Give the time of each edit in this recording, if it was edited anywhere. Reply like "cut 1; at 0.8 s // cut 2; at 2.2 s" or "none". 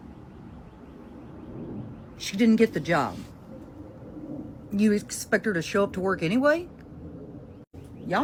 none